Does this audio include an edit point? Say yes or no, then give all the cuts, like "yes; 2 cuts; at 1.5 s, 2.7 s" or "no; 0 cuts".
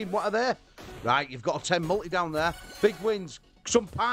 no; 0 cuts